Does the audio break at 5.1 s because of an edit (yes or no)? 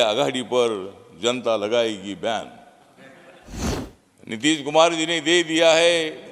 no